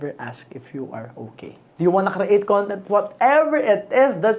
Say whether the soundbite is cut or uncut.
cut